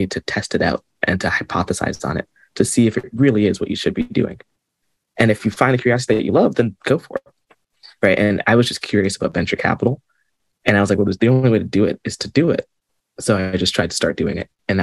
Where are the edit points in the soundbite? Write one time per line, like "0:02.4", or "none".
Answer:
none